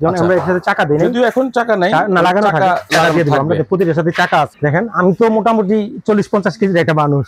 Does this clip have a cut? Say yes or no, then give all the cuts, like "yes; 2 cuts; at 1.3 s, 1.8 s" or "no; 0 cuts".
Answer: yes; 1 cut; at 4.5 s